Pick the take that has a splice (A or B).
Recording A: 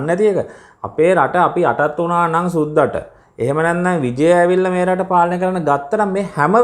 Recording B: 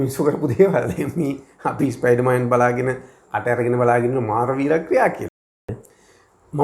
B